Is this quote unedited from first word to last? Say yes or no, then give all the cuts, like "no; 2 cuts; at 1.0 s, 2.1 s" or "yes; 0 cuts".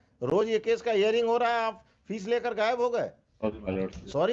yes; 0 cuts